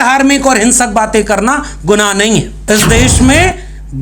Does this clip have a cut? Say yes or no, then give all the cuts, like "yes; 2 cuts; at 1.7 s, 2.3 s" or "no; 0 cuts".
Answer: yes; 1 cut; at 2.5 s